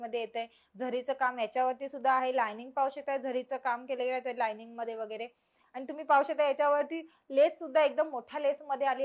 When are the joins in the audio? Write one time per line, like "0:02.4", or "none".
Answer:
none

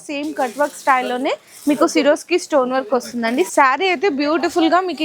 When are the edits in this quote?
0:03.5

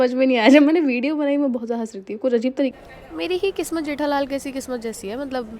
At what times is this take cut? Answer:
0:02.7

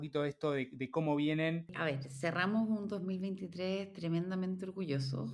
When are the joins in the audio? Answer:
0:01.7

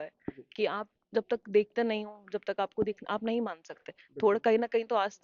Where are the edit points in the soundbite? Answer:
none

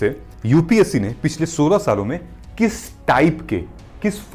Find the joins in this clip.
none

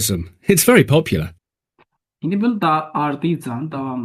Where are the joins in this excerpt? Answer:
none

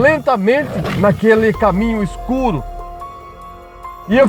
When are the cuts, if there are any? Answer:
0:00.9

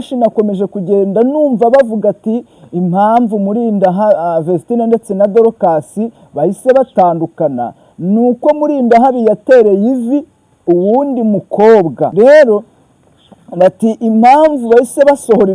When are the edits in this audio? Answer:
0:12.1

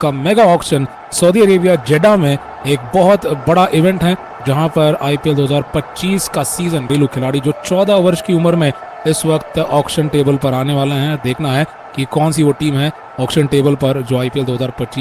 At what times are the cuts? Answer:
0:06.9

